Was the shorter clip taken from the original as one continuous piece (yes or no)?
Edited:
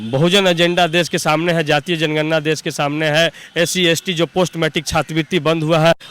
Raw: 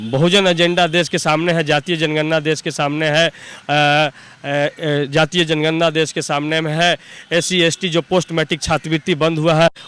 no